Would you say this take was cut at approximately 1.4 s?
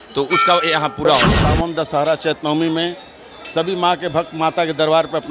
yes; 1 cut; at 1.4 s

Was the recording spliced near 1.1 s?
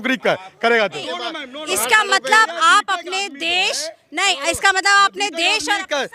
yes; 1 cut; at 1.1 s

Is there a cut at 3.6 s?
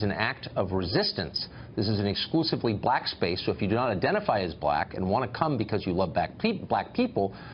yes; 1 cut; at 3.6 s

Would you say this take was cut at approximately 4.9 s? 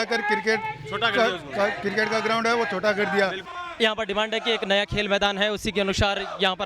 no; 1 cut; at 3.4 s

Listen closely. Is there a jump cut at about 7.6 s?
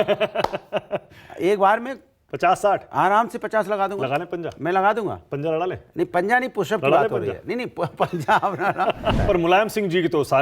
no; 1 cut; at 9.2 s

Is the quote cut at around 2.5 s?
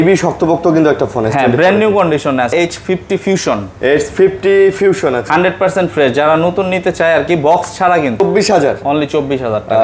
yes; 2 cuts; at 2.5 s, 8.2 s

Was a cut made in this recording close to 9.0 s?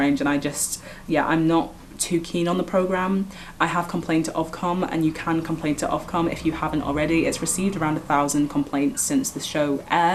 no; 0 cuts

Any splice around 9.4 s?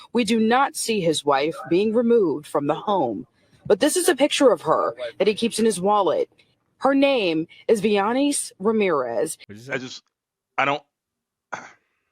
yes; 1 cut; at 9.4 s

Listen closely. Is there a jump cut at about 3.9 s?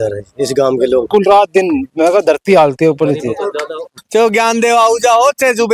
yes; 2 cuts; at 1.1 s, 3.9 s

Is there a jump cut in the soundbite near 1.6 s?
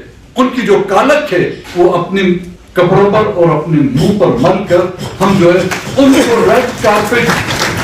yes; 1 cut; at 1.6 s

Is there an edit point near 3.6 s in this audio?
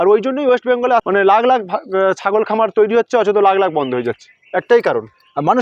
no; 1 cut; at 1.0 s

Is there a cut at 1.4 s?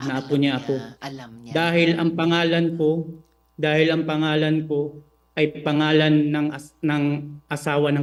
no; 0 cuts

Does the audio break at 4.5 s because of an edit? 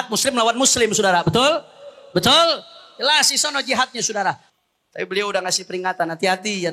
yes; 1 cut; at 4.5 s

